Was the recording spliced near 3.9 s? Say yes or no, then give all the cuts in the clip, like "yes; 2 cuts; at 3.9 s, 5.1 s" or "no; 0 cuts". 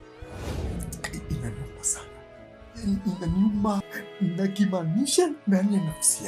yes; 1 cut; at 3.9 s